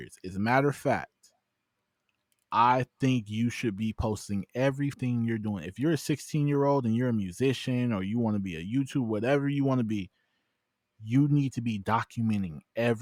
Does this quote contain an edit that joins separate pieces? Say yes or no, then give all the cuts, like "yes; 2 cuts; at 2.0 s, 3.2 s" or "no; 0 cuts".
no; 0 cuts